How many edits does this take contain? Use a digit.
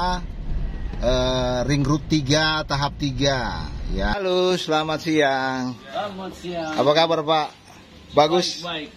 1